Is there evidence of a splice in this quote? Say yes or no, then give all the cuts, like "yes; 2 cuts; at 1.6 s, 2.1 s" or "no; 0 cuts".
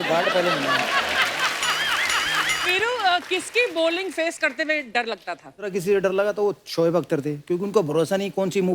yes; 2 cuts; at 2.6 s, 5.7 s